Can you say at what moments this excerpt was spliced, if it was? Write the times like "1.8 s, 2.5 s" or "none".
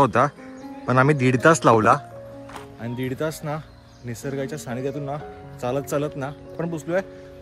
6.5 s